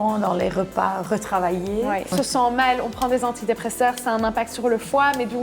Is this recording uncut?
no; 1 cut; at 2.1 s

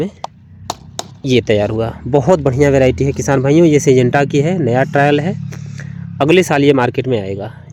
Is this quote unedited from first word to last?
yes; 0 cuts

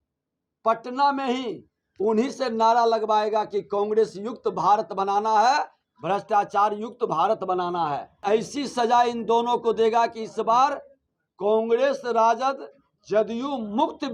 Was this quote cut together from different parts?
yes; 1 cut; at 8.2 s

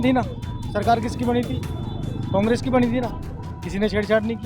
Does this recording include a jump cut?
no; 0 cuts

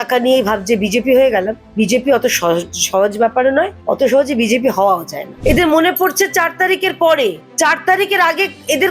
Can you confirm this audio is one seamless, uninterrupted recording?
no; 4 cuts; at 1.6 s, 3.8 s, 5.2 s, 7.4 s

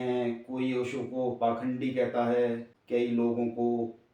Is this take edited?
yes; 1 cut; at 2.7 s

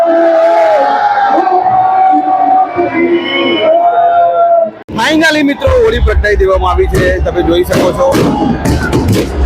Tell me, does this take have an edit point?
yes; 1 cut; at 4.9 s

